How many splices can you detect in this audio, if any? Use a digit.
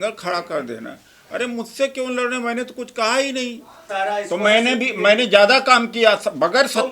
1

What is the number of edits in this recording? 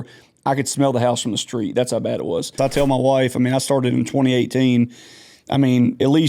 1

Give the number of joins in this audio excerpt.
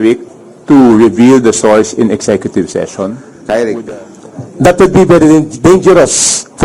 1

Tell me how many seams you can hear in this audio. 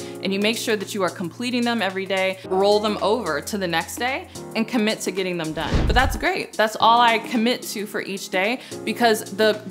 2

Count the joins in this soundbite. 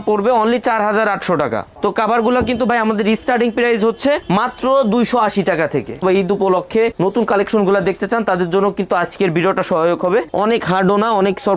3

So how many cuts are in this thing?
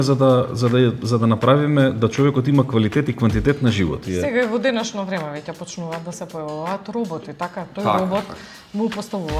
1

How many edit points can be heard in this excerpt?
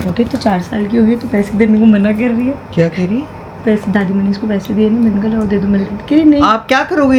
0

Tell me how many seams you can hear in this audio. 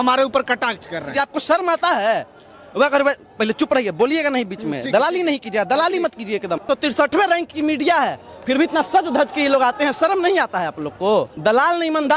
3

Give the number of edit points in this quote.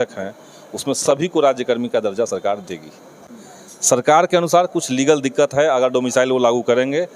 1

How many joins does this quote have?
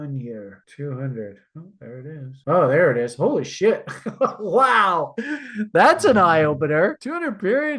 1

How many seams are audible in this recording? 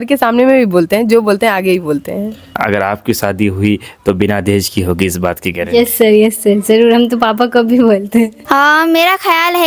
2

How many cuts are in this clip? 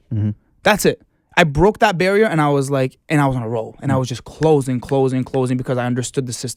0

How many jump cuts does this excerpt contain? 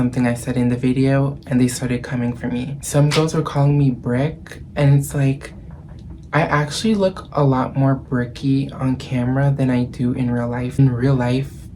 2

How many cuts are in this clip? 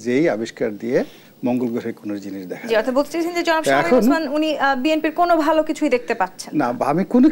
0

